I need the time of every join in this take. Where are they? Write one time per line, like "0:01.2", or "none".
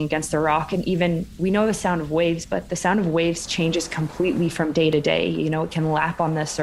0:01.2

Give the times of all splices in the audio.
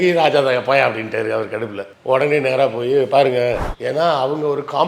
0:03.7

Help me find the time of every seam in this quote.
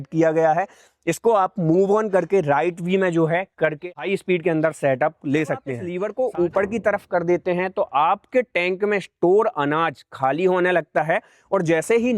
0:03.9
0:05.8

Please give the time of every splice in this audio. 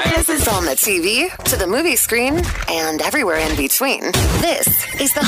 none

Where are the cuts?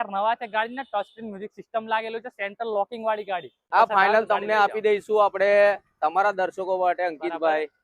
0:03.7

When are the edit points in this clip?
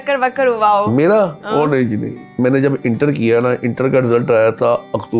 0:02.2

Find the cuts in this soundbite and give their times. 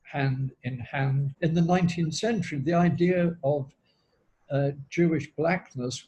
0:01.3

